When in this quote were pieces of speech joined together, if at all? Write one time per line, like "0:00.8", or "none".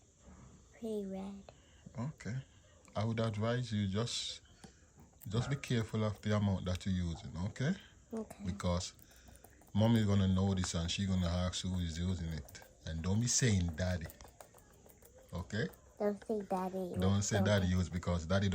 none